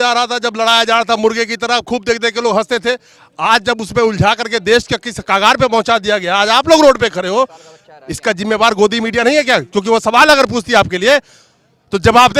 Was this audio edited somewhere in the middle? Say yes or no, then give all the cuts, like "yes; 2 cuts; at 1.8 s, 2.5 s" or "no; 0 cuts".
no; 0 cuts